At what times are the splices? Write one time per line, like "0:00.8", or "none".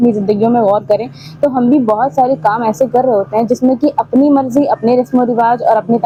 none